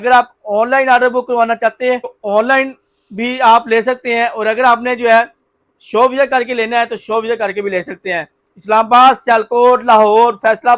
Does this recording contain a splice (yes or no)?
no